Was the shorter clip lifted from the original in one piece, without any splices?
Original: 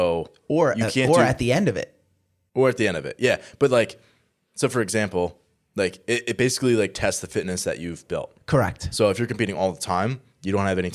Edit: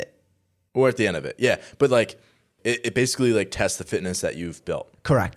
no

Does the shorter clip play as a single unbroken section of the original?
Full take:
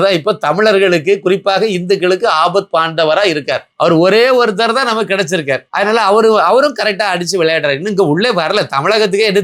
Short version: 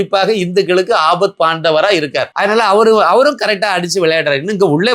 no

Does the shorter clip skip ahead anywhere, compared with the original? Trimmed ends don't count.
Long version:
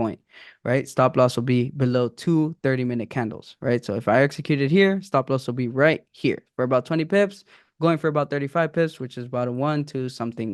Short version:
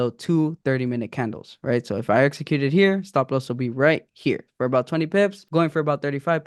yes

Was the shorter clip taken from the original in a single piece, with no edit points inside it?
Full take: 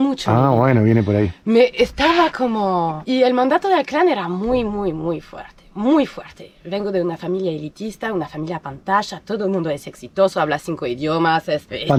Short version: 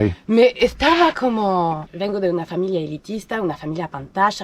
no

